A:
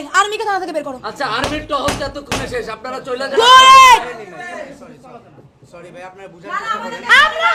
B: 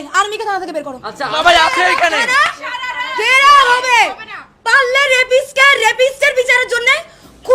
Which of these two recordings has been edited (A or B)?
B